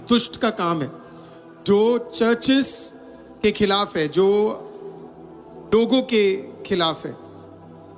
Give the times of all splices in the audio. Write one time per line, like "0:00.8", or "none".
none